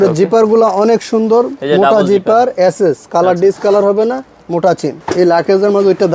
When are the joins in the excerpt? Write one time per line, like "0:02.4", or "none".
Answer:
0:05.0